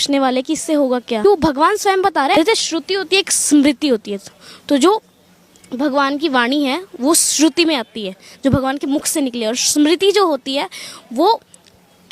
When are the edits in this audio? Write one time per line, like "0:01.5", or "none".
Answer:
0:01.2
0:02.4